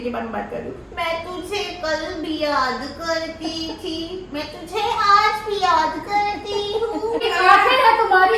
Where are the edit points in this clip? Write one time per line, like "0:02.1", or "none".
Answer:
0:07.2